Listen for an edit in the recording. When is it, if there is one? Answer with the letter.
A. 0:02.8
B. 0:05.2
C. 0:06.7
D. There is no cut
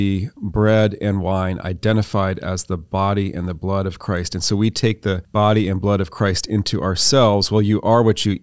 B